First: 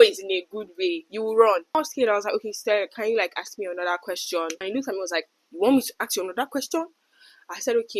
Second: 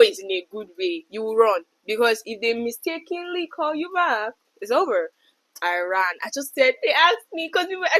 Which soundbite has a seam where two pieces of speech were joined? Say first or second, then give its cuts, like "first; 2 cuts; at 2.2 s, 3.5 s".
first; 2 cuts; at 1.7 s, 4.6 s